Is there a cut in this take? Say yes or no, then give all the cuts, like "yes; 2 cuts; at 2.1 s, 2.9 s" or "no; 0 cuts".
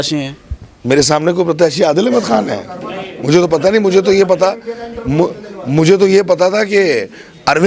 no; 0 cuts